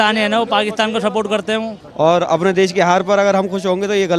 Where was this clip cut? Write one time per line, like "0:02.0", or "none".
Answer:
0:01.8